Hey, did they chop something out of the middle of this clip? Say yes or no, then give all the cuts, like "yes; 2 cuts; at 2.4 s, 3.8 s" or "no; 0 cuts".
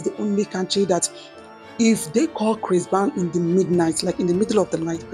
no; 0 cuts